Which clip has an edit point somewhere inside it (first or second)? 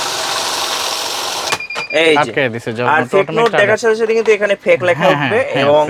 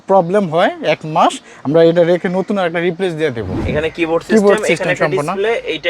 second